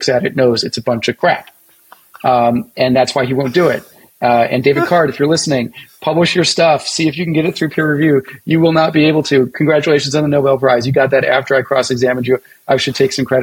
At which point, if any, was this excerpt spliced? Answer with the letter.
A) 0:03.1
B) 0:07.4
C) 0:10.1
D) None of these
D